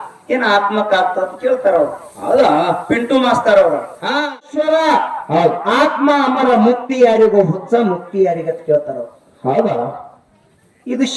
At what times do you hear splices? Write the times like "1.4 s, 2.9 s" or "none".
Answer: 4.4 s